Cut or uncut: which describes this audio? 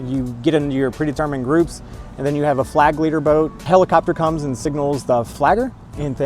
cut